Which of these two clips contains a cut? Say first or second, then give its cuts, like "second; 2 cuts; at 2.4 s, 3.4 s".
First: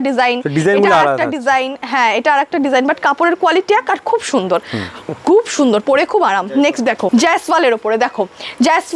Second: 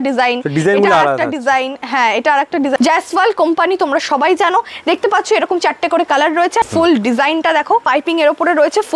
second; 3 cuts; at 2.8 s, 6.7 s, 7.8 s